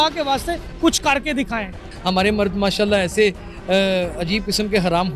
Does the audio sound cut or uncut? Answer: cut